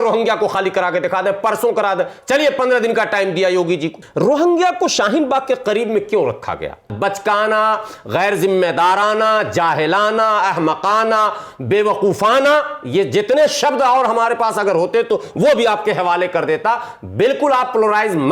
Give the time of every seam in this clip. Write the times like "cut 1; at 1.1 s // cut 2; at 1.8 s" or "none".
cut 1; at 4.0 s // cut 2; at 6.9 s